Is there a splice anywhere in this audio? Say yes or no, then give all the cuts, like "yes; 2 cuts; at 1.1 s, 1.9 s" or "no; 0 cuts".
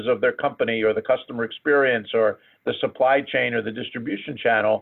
no; 0 cuts